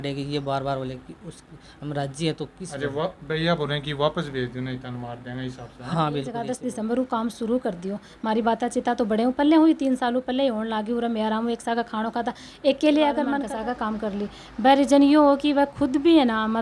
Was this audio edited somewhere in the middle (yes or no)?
yes